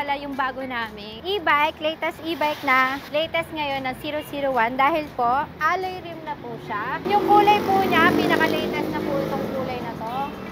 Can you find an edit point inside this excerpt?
yes; 4 cuts; at 1.1 s, 3.0 s, 5.5 s, 7.0 s

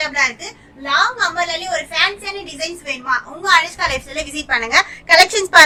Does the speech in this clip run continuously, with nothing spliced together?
yes; 0 cuts

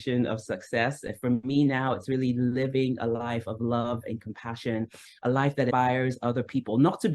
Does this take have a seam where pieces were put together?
yes; 1 cut; at 5.7 s

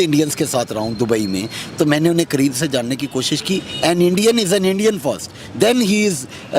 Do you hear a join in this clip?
no; 0 cuts

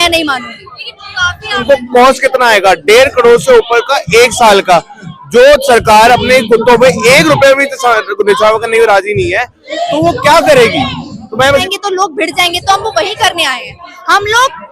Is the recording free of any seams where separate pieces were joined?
no; 2 cuts; at 1.6 s, 11.7 s

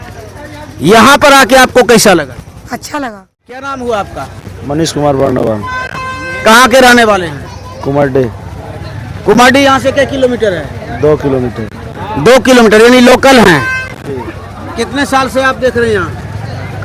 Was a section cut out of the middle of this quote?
yes; 1 cut; at 3.7 s

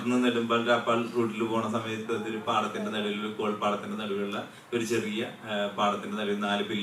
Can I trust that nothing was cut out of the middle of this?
yes; 0 cuts

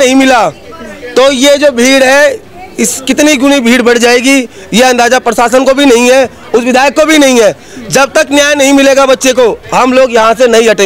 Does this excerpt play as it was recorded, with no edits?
yes; 0 cuts

